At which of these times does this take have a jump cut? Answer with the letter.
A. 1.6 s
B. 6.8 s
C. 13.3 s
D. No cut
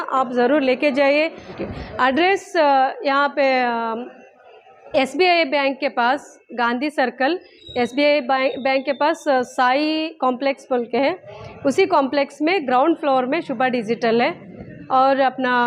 A